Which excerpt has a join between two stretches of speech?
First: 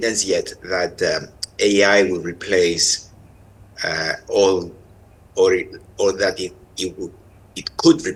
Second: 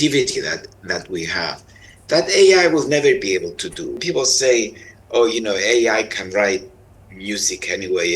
second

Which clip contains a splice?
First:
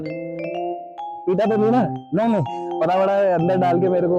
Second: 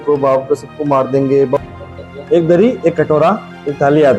second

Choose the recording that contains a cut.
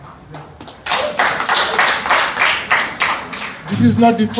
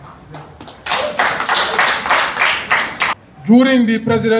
second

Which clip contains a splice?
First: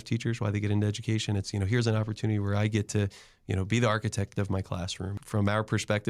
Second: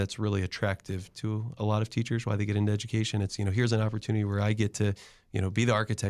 first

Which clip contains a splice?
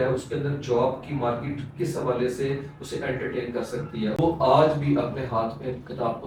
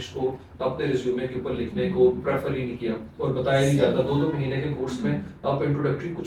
first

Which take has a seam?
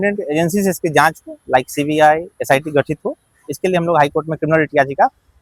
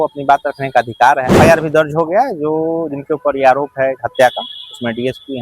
second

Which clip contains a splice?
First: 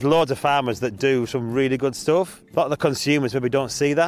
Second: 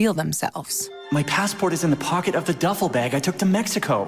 first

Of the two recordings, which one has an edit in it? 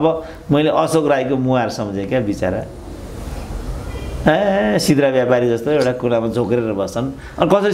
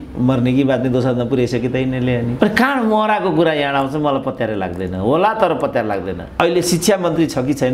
second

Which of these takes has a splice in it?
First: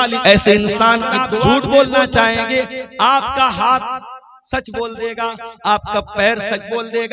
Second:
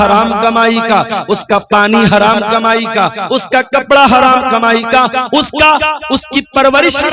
first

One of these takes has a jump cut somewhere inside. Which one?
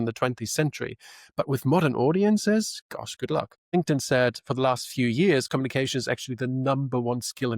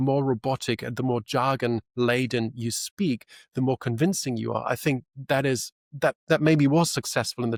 first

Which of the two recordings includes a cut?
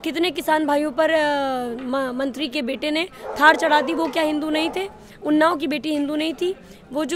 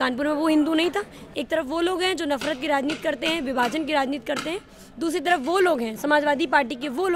second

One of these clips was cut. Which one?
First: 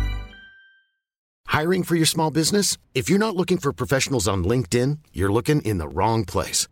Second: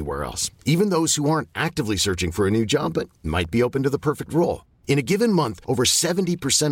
first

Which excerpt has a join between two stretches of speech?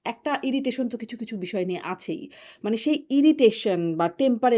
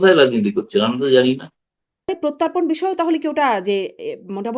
second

